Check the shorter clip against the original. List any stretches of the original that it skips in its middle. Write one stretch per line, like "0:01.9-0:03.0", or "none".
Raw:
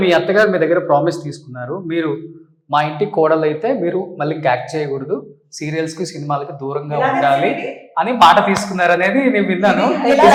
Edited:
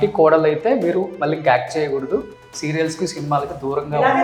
none